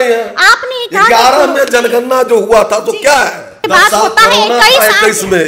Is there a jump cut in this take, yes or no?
yes